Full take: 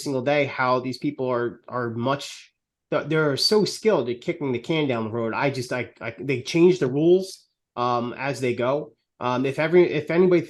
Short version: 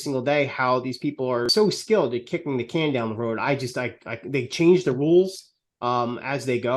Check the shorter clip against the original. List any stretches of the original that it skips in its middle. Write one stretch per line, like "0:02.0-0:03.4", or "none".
0:01.5-0:03.4